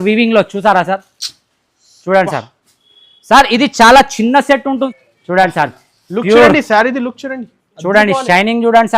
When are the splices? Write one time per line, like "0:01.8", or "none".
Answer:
0:04.9